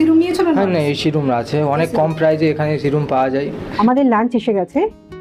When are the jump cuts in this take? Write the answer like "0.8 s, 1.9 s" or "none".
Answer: 3.7 s